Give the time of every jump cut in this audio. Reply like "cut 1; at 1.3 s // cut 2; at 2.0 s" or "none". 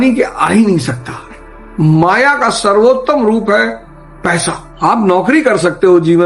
none

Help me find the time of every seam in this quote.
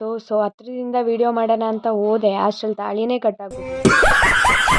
cut 1; at 3.5 s

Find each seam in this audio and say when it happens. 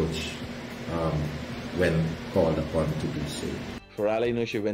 cut 1; at 3.8 s

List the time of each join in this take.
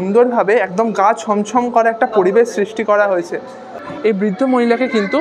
cut 1; at 3.8 s

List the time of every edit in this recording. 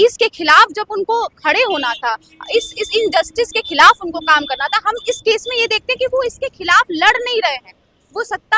none

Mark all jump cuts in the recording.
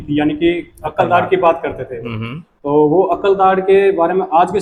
none

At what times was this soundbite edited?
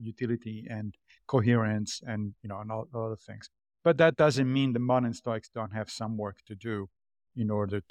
none

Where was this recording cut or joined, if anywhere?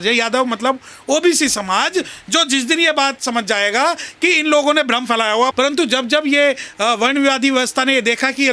cut 1; at 5.5 s

